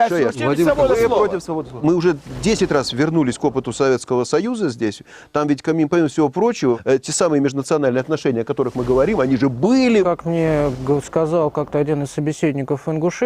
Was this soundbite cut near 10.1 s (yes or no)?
yes